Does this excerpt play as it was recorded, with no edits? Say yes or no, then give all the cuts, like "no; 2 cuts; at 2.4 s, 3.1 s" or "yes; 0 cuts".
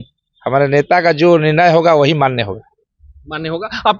yes; 0 cuts